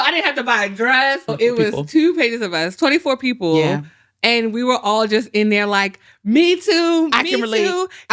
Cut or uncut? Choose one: cut